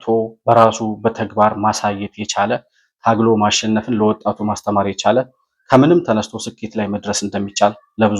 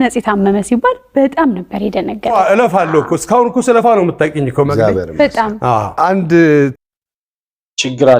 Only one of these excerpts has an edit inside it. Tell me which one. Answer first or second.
second